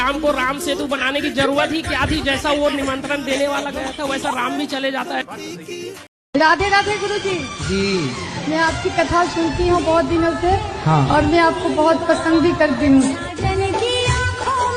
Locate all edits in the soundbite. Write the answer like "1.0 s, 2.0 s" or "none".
6.0 s